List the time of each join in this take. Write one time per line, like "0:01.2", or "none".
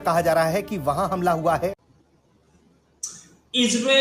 0:01.8